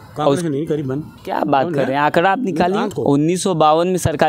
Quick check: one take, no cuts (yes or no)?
no